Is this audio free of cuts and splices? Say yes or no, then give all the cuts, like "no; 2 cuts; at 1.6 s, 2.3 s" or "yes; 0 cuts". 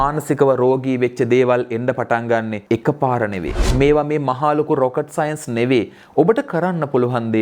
no; 2 cuts; at 2.6 s, 3.5 s